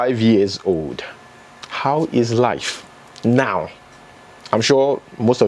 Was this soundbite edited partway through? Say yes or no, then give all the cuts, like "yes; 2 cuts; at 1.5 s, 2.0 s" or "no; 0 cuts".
no; 0 cuts